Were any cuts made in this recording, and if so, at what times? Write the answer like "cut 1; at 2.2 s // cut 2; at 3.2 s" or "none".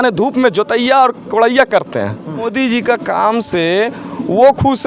cut 1; at 2.5 s